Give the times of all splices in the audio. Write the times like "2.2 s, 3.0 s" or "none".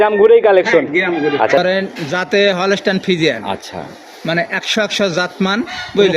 1.6 s